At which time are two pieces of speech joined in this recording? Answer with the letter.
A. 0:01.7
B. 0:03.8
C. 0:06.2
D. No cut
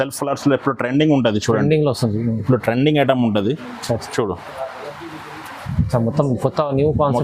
D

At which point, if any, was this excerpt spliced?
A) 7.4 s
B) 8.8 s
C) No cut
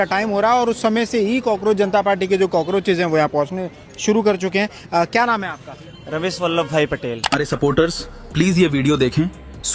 A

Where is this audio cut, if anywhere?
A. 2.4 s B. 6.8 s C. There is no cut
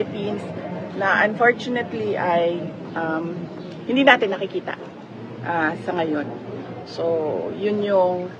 B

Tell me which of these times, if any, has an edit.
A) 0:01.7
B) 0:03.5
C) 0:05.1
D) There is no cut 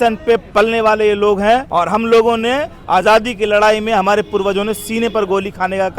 A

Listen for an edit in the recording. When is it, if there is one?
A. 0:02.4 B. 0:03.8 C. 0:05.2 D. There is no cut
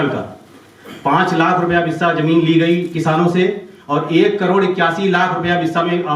D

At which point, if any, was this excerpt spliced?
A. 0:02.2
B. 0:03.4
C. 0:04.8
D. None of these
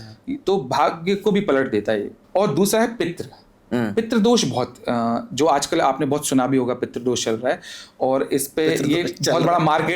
A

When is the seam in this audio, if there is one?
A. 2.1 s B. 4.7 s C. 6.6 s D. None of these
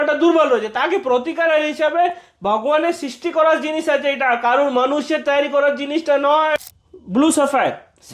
C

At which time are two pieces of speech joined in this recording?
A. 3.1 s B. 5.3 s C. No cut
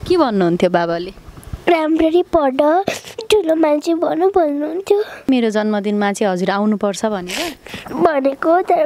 B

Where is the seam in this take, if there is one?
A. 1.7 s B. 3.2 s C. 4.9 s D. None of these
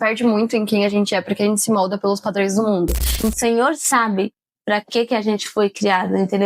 B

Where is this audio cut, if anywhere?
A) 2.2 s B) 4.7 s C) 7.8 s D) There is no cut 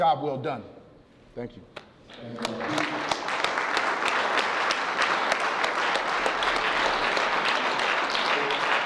D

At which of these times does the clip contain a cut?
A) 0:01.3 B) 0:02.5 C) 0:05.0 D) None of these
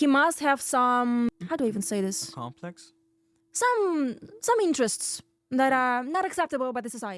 A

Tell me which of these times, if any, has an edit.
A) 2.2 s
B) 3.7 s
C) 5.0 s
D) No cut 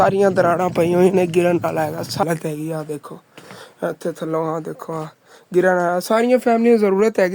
A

